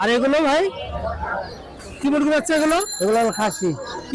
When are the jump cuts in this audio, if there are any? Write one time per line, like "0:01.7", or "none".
none